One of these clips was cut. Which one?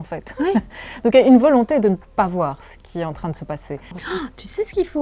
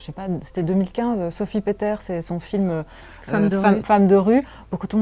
first; 1 cut; at 4.0 s

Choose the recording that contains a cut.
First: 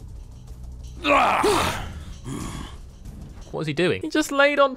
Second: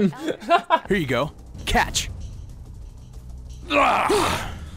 second; 1 cut; at 1.2 s

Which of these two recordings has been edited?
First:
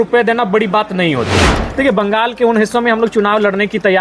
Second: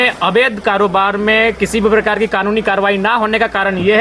first; 1 cut; at 1.6 s

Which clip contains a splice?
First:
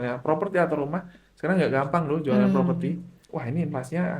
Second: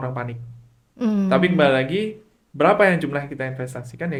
first; 1 cut; at 3.3 s

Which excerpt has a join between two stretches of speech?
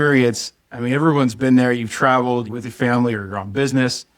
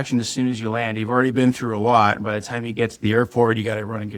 first; 1 cut; at 2.5 s

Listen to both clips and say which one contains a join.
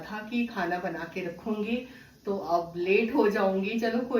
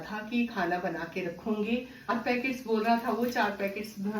second; 1 cut; at 2.1 s

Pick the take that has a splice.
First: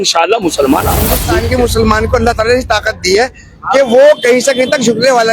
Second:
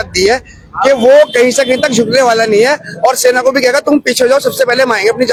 first; 1 cut; at 1.3 s

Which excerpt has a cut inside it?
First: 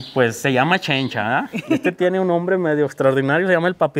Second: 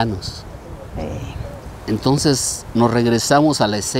first; 1 cut; at 1.7 s

